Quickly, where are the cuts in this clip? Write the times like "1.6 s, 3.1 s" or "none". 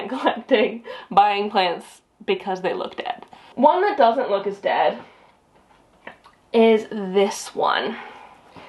none